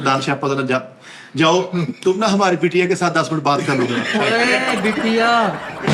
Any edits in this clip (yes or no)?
no